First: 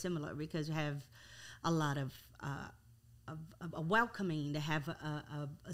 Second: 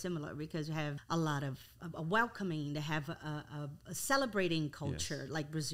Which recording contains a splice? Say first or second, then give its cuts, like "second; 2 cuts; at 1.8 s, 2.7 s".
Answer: second; 2 cuts; at 1.0 s, 1.7 s